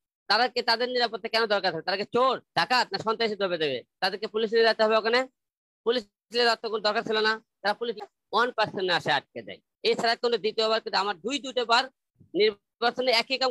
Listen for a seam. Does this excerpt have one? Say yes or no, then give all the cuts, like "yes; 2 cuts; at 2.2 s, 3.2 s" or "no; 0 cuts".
yes; 1 cut; at 8.0 s